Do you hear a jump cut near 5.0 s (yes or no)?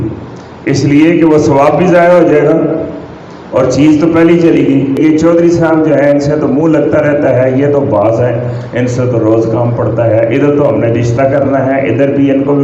yes